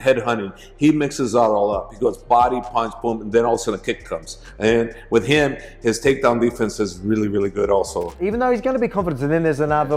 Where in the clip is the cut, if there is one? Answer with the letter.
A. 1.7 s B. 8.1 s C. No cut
B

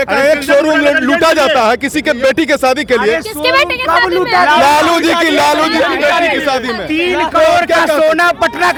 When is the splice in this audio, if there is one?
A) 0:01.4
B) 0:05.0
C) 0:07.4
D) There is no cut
D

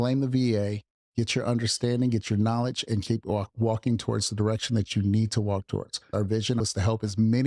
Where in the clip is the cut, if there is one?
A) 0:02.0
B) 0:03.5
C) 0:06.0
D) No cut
C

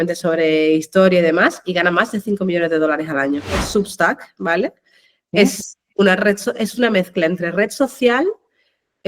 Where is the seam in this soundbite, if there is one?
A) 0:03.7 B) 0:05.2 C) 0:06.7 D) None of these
A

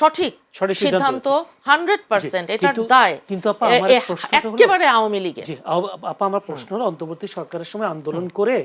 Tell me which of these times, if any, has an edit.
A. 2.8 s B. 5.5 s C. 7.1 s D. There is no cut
D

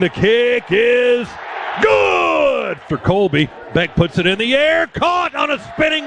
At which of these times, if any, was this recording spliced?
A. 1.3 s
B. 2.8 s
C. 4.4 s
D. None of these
B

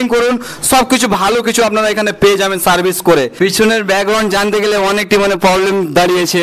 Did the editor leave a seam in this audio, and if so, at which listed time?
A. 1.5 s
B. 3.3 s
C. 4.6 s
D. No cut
B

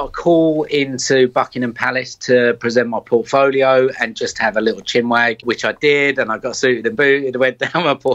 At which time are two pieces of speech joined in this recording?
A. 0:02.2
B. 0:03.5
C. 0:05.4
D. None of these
C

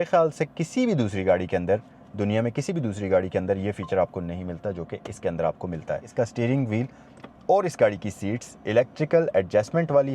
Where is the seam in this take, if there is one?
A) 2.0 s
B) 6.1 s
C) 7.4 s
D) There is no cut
B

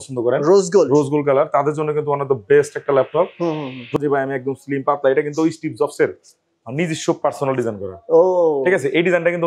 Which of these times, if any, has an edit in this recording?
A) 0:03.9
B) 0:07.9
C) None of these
A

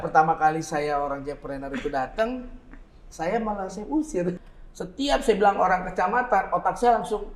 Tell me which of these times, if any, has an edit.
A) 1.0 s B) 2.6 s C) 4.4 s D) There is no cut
C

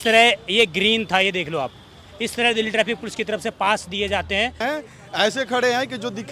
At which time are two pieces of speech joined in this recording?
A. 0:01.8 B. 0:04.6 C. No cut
B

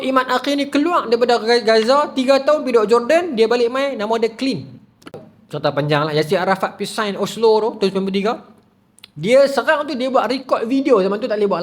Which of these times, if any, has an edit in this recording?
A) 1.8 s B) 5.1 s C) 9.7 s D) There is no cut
B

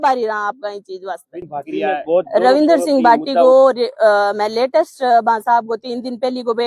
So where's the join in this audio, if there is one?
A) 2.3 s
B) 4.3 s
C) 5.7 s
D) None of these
A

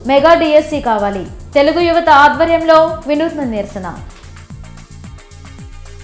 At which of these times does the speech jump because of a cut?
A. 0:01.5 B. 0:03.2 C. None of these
C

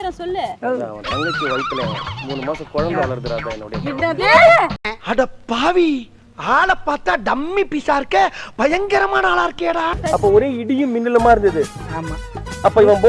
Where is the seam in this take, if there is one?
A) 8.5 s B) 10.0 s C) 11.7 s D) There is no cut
B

